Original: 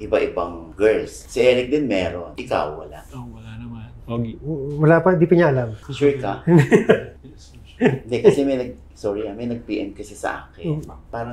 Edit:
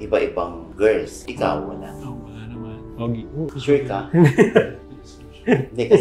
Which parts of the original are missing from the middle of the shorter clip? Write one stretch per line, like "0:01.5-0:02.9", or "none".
0:01.2-0:02.3
0:04.6-0:05.8